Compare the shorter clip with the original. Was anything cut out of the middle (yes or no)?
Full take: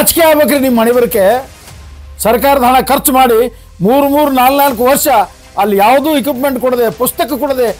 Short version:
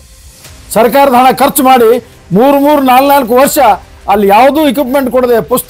no